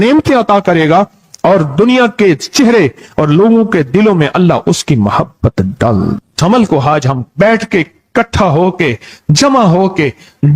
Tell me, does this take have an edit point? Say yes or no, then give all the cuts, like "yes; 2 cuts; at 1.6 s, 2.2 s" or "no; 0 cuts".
yes; 1 cut; at 6.2 s